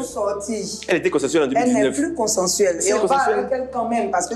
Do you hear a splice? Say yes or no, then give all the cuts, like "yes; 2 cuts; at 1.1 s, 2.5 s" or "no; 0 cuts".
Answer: no; 0 cuts